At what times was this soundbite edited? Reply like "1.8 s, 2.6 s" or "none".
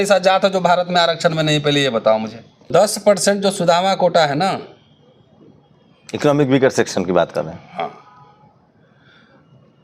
2.7 s